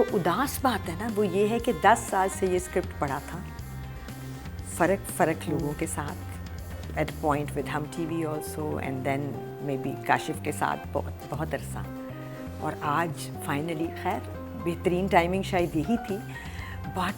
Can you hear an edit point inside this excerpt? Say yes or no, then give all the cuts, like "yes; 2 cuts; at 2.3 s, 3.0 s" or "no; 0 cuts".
no; 0 cuts